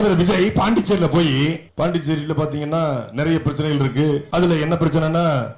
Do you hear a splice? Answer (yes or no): yes